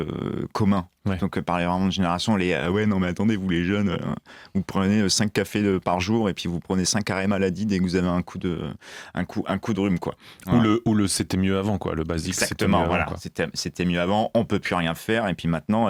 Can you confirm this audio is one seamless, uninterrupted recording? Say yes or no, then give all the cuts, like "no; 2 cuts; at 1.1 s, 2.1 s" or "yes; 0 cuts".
yes; 0 cuts